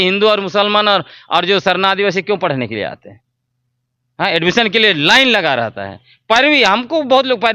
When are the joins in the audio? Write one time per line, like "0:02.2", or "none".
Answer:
none